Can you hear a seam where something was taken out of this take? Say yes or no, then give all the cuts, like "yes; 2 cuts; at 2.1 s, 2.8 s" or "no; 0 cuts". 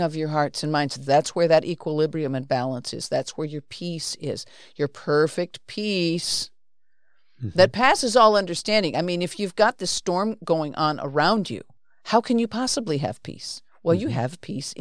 yes; 1 cut; at 1.0 s